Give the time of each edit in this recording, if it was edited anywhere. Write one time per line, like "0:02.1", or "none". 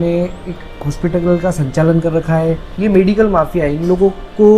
0:02.7